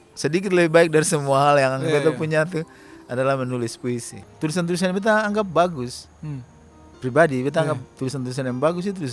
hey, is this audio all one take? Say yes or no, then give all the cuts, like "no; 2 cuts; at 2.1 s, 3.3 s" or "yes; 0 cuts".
no; 1 cut; at 4.2 s